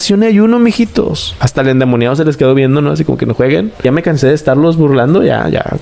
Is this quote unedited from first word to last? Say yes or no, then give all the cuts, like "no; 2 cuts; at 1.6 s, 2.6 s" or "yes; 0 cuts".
no; 2 cuts; at 1.3 s, 3.8 s